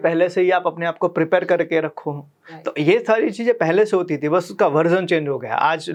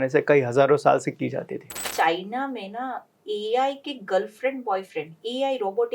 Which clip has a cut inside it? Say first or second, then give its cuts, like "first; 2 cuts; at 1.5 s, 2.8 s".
second; 1 cut; at 1.8 s